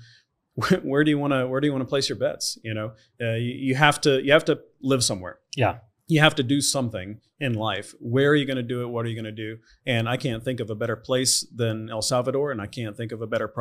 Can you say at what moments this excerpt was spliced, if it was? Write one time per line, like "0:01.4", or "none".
none